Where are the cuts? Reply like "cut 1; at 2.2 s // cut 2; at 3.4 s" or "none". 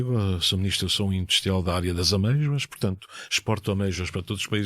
cut 1; at 1.3 s

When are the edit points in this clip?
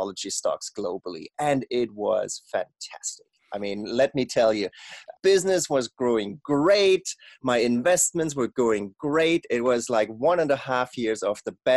none

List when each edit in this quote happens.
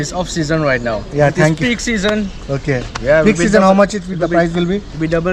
none

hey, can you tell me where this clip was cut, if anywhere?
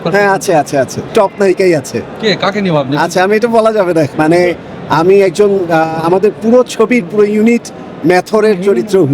cut 1; at 1.1 s // cut 2; at 4.1 s

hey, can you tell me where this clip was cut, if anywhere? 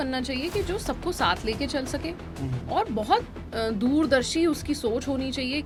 none

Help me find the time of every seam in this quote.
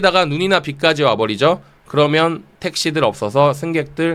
none

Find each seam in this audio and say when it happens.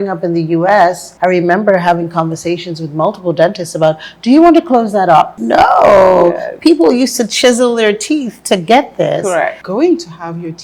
cut 1; at 1.1 s // cut 2; at 5.4 s // cut 3; at 9.6 s

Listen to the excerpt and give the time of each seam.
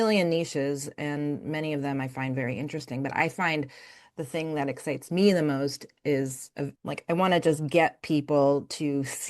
cut 1; at 6.7 s

